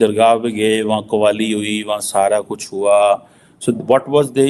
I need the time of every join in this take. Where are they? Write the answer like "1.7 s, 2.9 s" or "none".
none